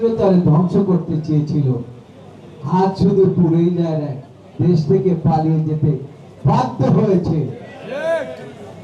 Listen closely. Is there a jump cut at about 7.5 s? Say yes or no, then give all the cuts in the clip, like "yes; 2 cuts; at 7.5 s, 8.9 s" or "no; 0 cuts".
no; 0 cuts